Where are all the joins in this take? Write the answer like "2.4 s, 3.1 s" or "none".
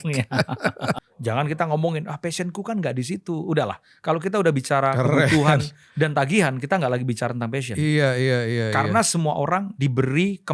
1.1 s